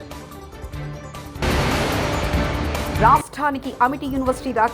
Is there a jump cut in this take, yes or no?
yes